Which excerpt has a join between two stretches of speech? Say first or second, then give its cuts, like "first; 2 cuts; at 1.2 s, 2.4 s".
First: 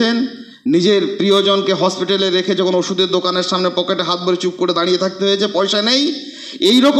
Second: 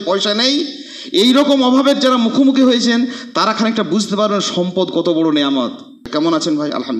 second; 1 cut; at 6.1 s